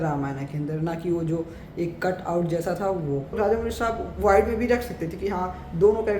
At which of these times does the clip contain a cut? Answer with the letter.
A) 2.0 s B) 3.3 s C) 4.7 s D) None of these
B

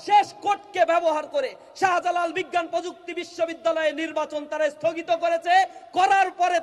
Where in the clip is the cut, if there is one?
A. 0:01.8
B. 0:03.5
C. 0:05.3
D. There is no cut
D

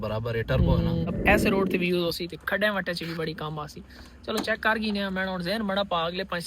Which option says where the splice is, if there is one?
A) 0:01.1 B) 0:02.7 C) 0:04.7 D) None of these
A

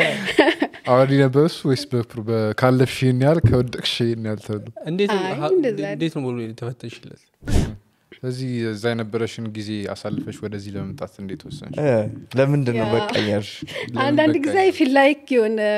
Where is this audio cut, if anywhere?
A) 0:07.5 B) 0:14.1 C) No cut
A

